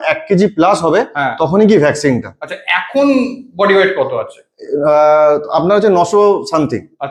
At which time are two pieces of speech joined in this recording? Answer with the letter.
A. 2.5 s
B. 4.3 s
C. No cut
C